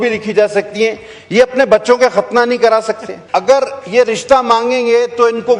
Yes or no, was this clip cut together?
yes